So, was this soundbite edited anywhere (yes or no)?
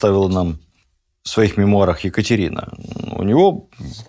no